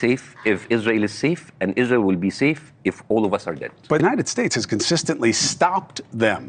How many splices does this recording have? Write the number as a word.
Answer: one